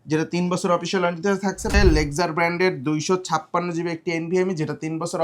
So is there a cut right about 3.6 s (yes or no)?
no